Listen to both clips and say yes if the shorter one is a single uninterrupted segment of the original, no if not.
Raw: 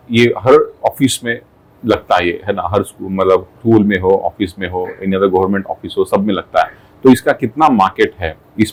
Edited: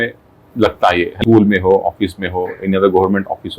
no